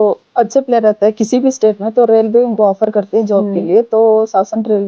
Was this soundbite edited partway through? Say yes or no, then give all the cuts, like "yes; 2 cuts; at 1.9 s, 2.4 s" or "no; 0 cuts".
no; 0 cuts